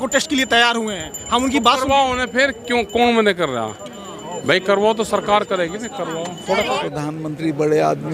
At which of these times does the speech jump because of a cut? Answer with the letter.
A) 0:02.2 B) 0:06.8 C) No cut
B